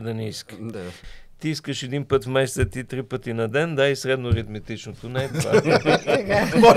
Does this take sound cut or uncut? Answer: cut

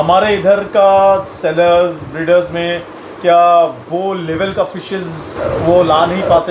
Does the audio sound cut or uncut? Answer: cut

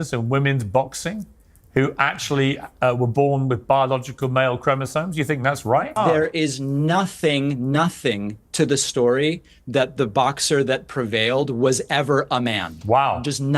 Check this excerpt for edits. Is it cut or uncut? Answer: cut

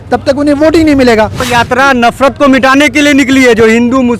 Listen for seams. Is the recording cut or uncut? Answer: cut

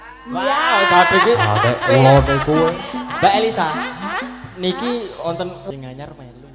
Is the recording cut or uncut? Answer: cut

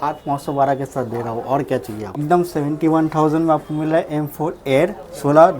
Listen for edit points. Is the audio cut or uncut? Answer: cut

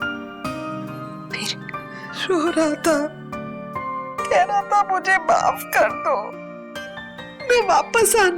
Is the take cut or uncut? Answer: cut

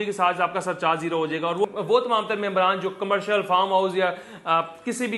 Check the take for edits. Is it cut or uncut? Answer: cut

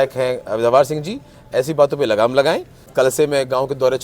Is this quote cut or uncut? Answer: cut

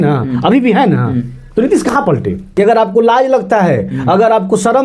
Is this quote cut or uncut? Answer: cut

